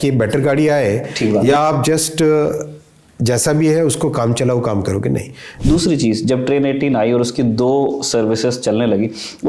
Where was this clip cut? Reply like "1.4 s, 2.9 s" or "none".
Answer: 5.4 s